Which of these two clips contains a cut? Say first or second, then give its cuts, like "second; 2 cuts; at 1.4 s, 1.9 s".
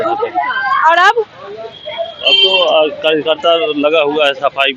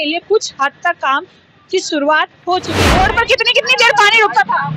second; 1 cut; at 2.7 s